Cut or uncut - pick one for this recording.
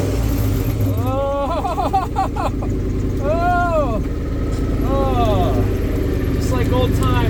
uncut